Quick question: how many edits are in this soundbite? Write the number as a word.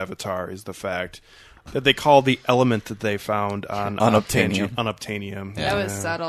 one